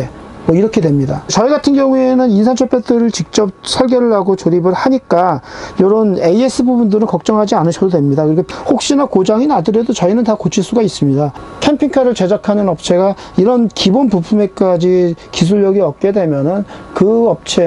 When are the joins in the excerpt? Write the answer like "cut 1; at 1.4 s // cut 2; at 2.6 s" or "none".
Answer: cut 1; at 1.2 s // cut 2; at 8.5 s // cut 3; at 11.4 s